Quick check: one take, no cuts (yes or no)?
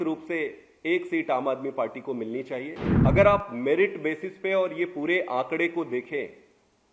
no